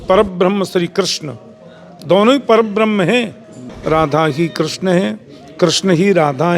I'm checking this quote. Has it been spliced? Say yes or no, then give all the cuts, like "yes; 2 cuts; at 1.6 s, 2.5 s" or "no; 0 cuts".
yes; 1 cut; at 3.7 s